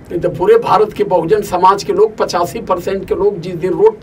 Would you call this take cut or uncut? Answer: uncut